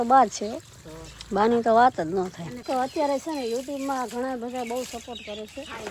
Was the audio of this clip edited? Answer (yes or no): yes